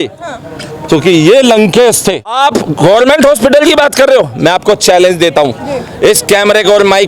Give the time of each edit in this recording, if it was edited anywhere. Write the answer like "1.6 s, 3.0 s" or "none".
2.3 s